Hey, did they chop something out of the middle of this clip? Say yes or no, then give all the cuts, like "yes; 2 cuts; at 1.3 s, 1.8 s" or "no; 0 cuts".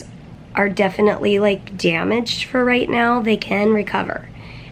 no; 0 cuts